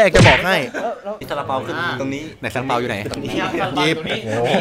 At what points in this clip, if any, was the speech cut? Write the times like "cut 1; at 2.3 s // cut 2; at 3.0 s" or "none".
cut 1; at 1.1 s